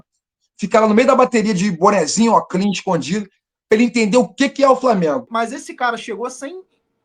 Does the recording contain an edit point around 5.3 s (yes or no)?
yes